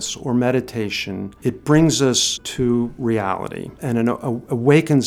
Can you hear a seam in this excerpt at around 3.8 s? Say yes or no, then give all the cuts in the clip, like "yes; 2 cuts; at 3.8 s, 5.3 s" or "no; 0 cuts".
yes; 3 cuts; at 1.3 s, 2.4 s, 3.8 s